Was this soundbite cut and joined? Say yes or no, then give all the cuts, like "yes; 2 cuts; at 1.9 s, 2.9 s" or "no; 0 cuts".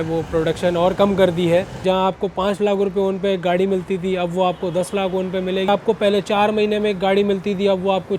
yes; 2 cuts; at 1.8 s, 5.7 s